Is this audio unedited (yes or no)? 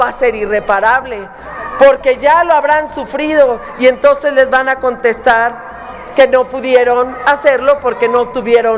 yes